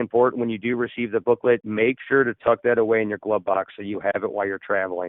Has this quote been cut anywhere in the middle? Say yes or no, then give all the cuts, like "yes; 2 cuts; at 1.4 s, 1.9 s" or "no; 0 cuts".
yes; 1 cut; at 1.4 s